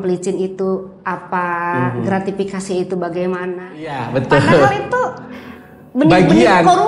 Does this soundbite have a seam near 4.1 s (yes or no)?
yes